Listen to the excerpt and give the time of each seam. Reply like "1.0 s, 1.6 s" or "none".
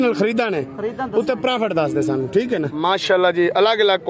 2.7 s